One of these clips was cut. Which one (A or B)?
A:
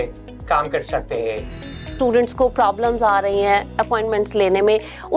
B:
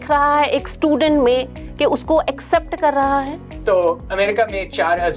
A